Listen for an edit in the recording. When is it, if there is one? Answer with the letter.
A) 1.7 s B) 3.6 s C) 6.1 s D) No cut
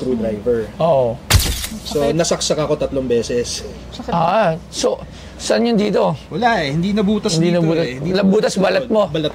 A